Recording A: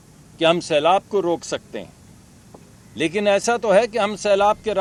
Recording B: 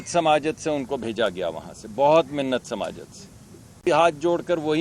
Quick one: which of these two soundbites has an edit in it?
B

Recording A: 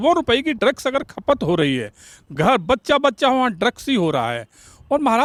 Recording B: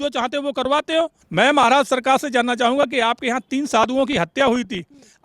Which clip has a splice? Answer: B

